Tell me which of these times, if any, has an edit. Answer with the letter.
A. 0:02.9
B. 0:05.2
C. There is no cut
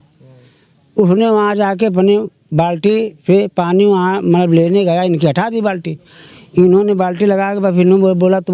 C